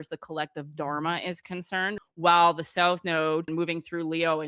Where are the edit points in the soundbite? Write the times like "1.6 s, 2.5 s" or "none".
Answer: 2.0 s, 3.5 s